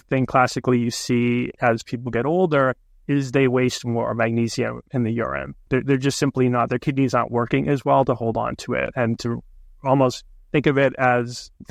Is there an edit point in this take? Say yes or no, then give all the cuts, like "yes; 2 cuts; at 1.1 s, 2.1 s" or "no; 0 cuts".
no; 0 cuts